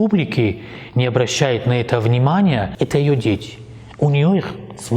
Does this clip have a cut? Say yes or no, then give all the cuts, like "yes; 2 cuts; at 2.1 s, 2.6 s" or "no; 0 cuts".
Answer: yes; 1 cut; at 2.7 s